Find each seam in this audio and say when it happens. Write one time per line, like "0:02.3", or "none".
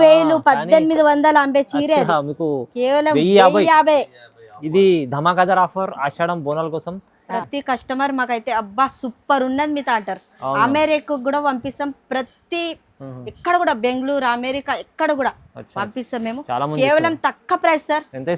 0:07.3